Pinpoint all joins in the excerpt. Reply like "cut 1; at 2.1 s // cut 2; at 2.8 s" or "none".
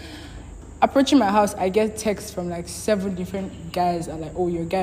none